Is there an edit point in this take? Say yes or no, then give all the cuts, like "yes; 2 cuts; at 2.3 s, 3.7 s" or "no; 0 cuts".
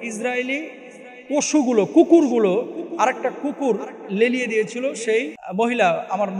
yes; 1 cut; at 5.4 s